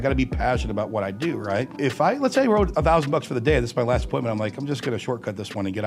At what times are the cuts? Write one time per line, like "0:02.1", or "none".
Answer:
0:01.7